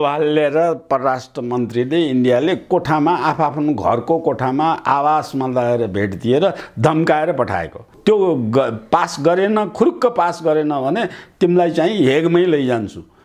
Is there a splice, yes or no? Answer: yes